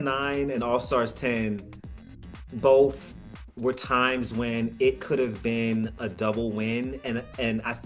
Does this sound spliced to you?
no; 0 cuts

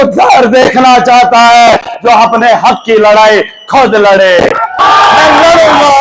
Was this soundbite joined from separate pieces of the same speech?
yes; 1 cut; at 5.1 s

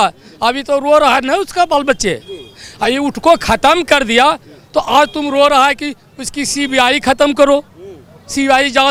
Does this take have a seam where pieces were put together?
no; 0 cuts

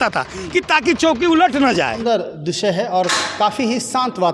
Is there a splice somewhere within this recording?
yes; 1 cut; at 2.0 s

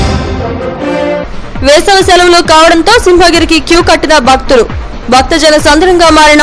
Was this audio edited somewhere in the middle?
yes; 1 cut; at 1.3 s

